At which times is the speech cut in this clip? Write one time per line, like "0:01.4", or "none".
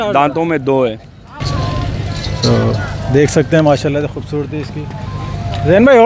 0:01.3